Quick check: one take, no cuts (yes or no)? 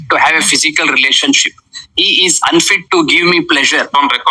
yes